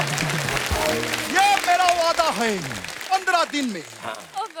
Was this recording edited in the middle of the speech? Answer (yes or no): no